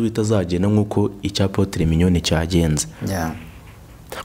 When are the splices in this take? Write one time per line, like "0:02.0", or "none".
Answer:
none